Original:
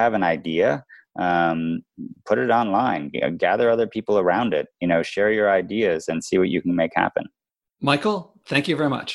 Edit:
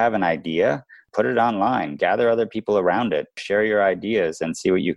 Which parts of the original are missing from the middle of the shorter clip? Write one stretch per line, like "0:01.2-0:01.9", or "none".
0:00.9-0:02.1
0:03.1-0:03.3
0:04.8-0:05.1

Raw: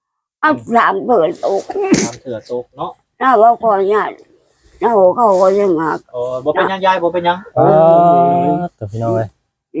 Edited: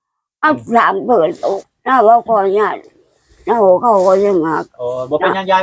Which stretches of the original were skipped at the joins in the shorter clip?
0:01.7-0:03.0

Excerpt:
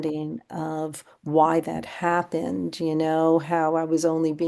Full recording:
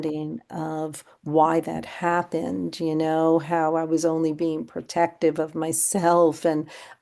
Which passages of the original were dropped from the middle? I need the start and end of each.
none

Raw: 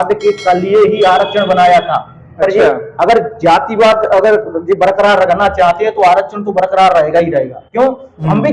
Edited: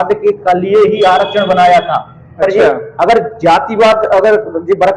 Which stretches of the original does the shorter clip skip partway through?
none

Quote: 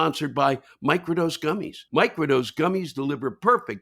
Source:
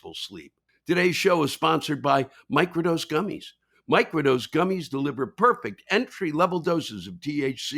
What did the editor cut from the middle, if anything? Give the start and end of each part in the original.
0:03.4-0:03.7

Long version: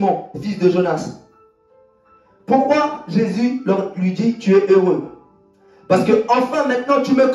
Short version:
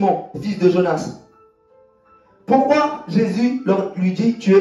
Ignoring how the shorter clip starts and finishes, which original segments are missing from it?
none

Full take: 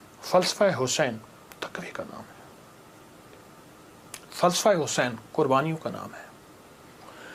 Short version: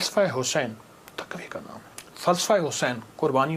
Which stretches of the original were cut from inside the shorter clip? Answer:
0:02.4-0:04.1

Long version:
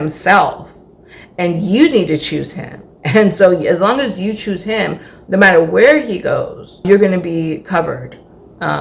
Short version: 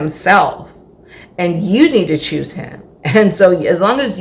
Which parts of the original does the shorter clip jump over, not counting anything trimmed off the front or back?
none

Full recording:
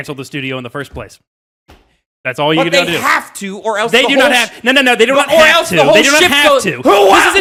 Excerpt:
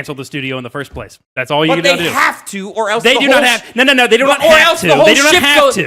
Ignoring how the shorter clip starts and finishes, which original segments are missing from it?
0:01.2-0:02.1

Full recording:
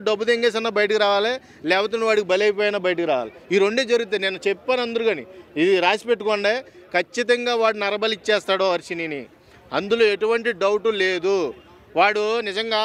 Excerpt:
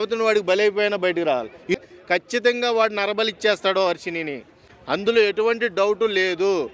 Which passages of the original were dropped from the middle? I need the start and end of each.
0:03.6-0:06.6

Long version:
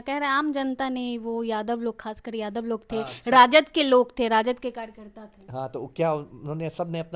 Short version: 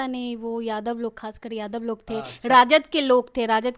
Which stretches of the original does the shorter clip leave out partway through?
none

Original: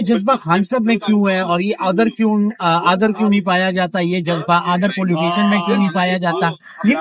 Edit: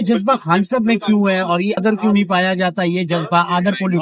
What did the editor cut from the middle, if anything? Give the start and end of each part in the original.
0:01.8-0:03.0

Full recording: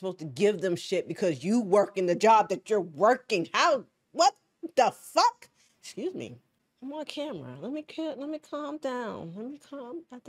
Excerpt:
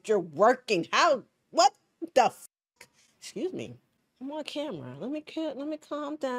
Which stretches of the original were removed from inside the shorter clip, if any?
none

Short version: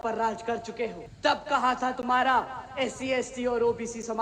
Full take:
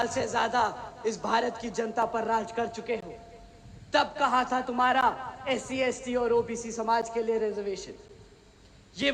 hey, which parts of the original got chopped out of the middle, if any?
0:03.1-0:03.7

